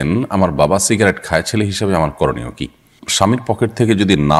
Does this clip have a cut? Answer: yes; 1 cut; at 3.0 s

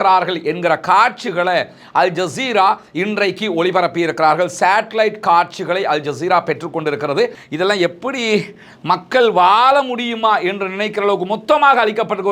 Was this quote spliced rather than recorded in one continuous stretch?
yes; 1 cut; at 7.4 s

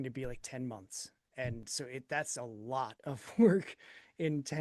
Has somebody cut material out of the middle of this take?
no; 0 cuts

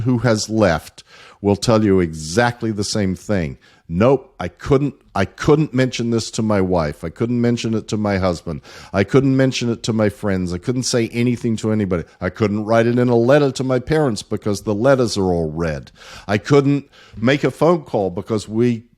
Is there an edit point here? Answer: no; 0 cuts

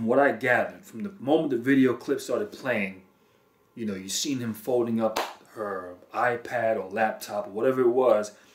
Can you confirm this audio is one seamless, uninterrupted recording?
no; 1 cut; at 2.9 s

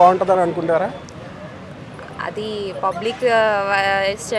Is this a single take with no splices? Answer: yes; 0 cuts

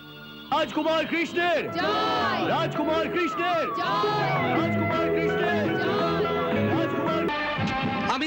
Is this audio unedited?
no; 1 cut; at 7.3 s

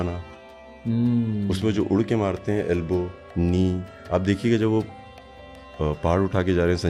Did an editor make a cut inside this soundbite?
no; 0 cuts

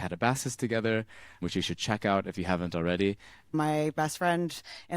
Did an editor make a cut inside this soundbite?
yes; 2 cuts; at 1.5 s, 3.5 s

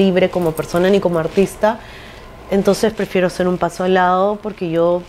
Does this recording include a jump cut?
no; 0 cuts

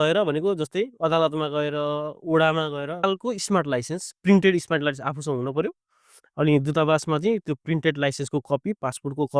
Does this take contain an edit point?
yes; 1 cut; at 3.0 s

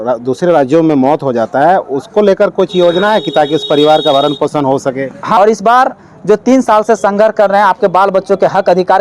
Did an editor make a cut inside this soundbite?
yes; 1 cut; at 5.4 s

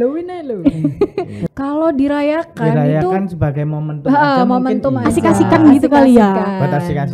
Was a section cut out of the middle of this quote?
yes; 1 cut; at 1.4 s

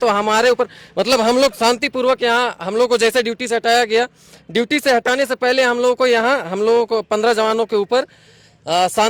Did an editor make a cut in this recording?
no; 0 cuts

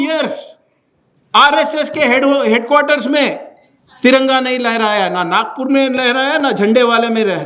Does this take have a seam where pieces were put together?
no; 0 cuts

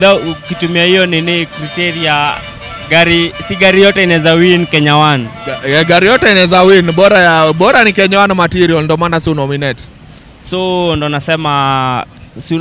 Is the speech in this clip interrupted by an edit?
no; 0 cuts

